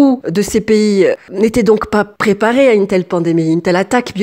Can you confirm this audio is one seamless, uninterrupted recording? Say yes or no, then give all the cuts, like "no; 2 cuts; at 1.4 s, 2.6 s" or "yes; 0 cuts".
yes; 0 cuts